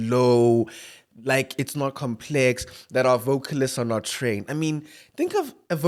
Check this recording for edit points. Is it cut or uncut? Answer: uncut